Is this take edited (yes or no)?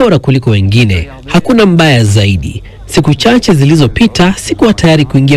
no